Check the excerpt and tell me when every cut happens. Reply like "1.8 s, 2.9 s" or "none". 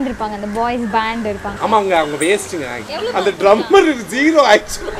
3.2 s